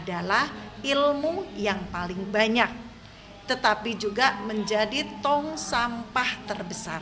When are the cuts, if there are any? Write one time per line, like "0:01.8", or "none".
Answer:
none